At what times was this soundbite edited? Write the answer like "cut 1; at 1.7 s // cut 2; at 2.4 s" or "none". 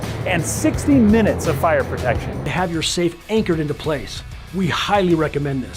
cut 1; at 2.4 s